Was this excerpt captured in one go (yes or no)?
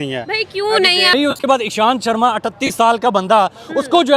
no